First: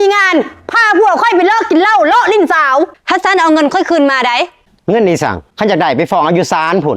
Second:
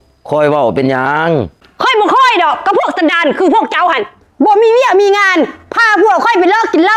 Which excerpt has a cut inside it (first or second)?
first